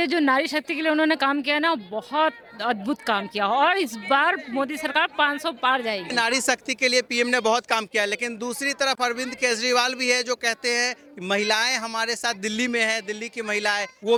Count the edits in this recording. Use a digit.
0